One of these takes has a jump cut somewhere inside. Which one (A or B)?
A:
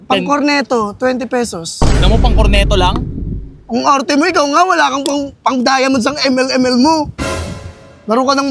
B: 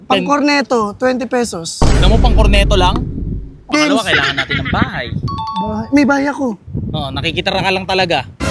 B